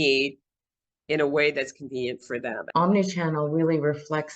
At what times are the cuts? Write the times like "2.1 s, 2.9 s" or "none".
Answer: 2.6 s